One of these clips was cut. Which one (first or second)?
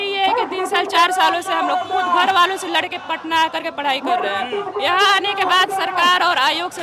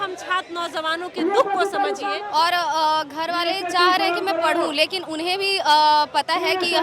second